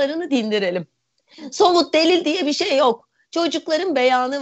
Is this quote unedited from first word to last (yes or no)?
yes